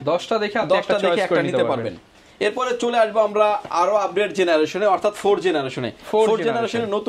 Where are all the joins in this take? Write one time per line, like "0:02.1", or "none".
none